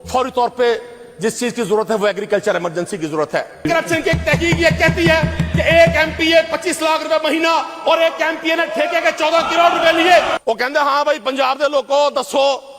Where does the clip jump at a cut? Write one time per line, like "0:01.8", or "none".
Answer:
0:03.7
0:10.3